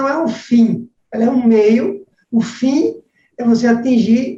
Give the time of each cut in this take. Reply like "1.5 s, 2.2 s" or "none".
none